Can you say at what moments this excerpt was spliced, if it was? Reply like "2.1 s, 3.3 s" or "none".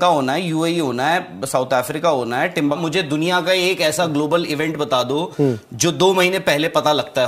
2.8 s